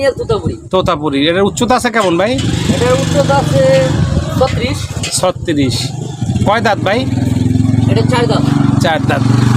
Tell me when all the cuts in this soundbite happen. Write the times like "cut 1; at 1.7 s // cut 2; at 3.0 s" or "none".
none